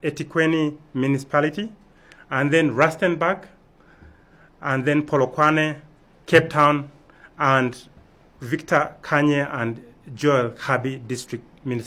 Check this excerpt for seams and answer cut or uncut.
uncut